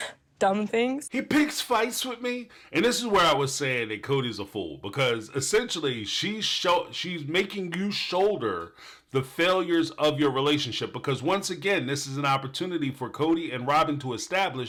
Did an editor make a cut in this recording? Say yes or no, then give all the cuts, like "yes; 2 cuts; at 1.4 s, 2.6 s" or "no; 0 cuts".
no; 0 cuts